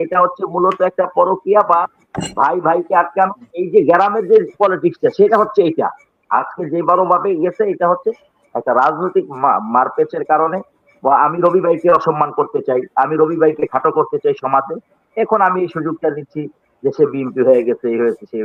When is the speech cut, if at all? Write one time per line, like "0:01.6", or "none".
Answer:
none

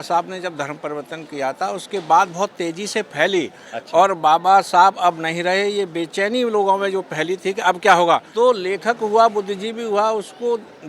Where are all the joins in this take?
0:08.3

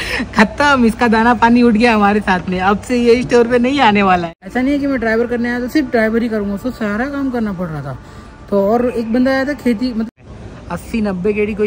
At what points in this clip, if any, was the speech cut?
0:04.4
0:10.1

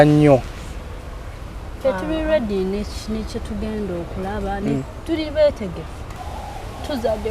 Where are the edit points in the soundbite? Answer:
0:06.2

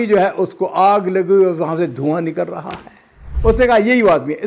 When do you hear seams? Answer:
0:03.3

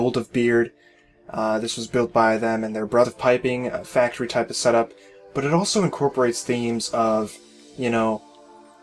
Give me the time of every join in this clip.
none

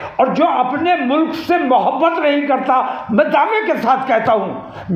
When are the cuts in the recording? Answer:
none

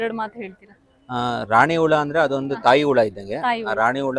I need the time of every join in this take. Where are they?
none

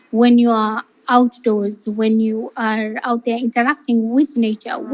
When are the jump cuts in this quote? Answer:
none

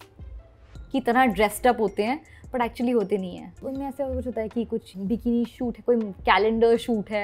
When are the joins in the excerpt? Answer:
0:03.6

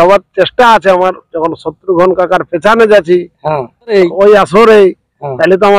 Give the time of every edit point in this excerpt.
0:03.9

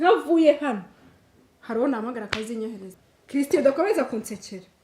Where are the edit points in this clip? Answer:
0:02.9

